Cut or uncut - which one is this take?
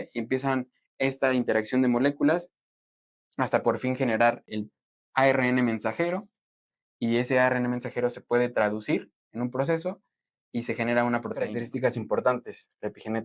cut